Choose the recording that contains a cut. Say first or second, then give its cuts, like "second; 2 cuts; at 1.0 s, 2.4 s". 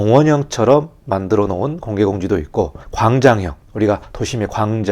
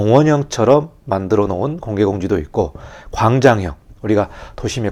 first; 2 cuts; at 2.8 s, 3.8 s